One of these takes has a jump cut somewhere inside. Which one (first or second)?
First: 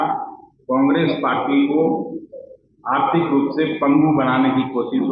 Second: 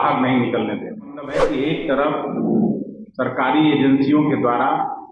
second